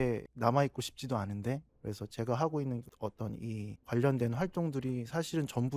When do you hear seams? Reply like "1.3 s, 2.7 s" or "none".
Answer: 1.7 s

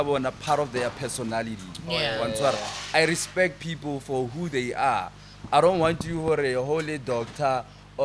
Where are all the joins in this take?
none

